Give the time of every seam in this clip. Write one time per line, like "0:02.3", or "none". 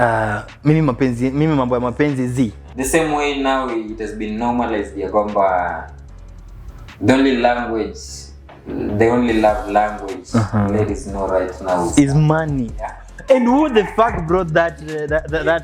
0:02.7